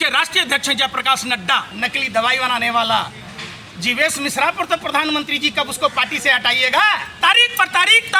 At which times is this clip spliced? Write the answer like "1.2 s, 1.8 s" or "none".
1.9 s, 7.1 s